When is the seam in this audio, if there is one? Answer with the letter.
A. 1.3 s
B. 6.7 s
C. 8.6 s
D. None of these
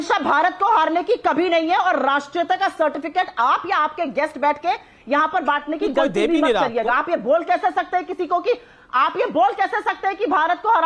D